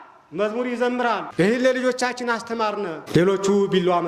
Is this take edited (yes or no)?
yes